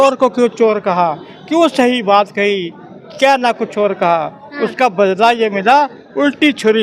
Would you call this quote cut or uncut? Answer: uncut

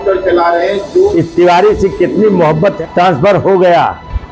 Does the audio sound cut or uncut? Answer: cut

